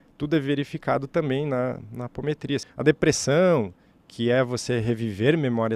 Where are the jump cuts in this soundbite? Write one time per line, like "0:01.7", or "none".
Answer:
0:02.7